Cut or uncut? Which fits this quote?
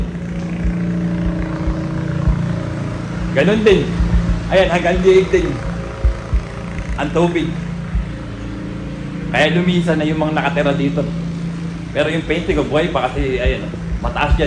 uncut